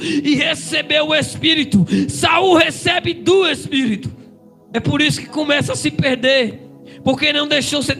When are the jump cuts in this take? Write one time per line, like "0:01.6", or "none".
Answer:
none